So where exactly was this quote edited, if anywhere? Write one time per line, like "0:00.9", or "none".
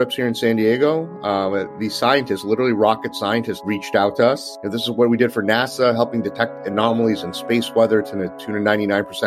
0:03.5